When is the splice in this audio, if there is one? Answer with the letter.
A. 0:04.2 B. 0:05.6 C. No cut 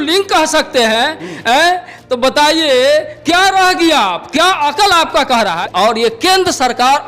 B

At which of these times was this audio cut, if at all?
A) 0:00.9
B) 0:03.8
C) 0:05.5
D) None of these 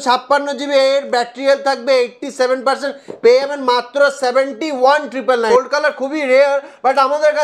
C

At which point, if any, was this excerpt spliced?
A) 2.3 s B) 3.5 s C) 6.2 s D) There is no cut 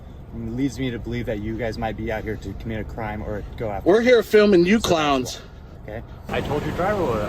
C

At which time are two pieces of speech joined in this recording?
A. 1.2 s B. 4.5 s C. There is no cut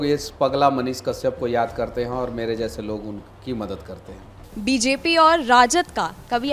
B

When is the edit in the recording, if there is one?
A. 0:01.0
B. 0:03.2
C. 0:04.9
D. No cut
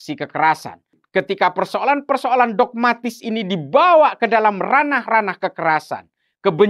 A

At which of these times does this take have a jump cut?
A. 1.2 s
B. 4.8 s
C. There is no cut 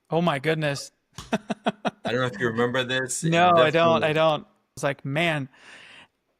B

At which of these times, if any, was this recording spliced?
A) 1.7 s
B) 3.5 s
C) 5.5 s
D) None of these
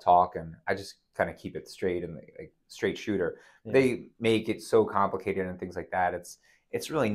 D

